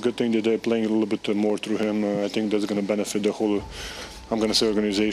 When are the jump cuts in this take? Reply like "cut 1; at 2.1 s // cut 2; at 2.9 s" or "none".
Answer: none